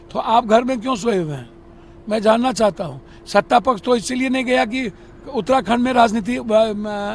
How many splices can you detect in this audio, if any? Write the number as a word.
zero